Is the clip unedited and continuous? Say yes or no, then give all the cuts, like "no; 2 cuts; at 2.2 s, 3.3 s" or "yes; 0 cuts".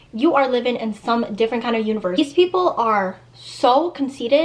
yes; 0 cuts